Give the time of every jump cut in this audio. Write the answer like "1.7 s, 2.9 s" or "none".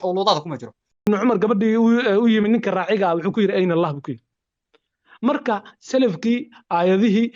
1.1 s